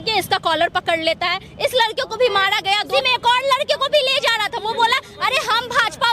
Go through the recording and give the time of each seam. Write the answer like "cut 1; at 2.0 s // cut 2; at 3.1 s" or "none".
cut 1; at 2.9 s